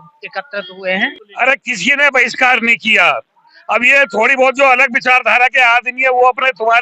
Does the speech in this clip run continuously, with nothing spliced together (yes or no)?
no